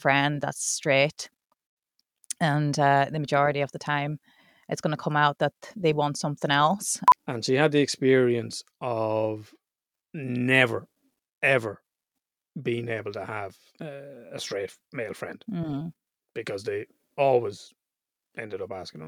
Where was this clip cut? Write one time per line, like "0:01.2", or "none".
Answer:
0:06.9
0:13.6